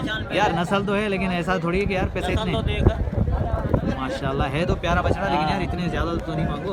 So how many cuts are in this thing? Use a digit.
0